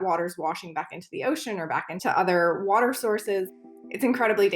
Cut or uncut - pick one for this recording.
cut